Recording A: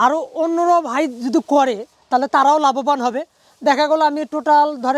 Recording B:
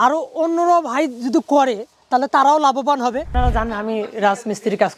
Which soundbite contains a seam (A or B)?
B